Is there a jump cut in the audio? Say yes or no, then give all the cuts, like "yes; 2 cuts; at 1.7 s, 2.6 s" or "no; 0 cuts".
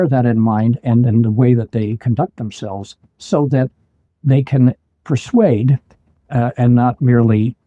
no; 0 cuts